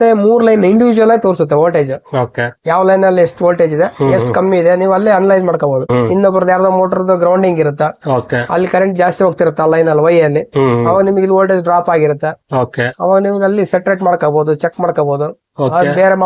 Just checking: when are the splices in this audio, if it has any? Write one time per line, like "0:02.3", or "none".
0:05.9